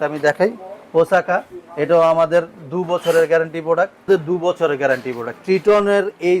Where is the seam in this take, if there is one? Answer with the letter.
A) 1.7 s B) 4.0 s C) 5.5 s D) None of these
B